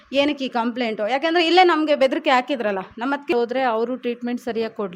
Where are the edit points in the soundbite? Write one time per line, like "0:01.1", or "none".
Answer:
0:03.3